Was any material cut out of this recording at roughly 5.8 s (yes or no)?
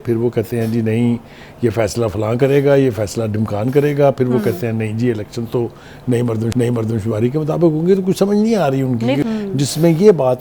no